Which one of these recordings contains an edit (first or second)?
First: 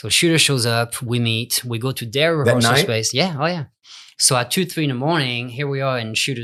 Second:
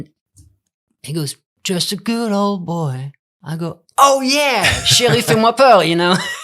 second